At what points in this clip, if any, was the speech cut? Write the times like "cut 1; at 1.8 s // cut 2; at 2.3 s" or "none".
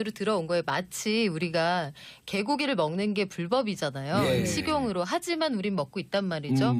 cut 1; at 5.6 s